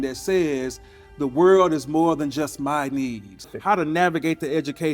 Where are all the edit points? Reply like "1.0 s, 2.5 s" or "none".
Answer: 3.5 s